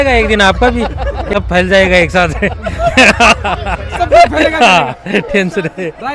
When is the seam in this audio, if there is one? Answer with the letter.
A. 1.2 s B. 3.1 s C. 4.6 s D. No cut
A